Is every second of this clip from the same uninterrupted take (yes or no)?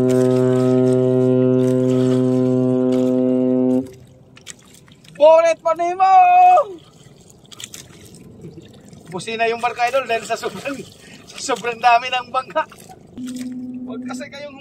no